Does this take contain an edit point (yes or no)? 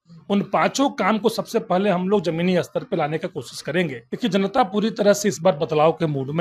yes